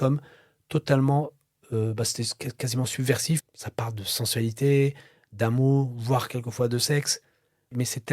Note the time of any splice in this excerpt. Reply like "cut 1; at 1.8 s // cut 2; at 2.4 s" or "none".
cut 1; at 3.4 s